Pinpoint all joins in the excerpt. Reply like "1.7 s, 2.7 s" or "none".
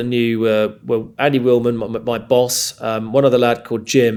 none